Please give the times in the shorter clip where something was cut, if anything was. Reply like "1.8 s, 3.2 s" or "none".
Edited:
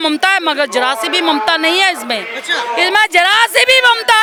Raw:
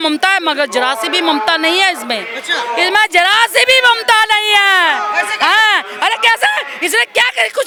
none